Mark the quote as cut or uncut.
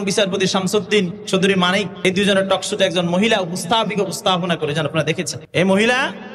cut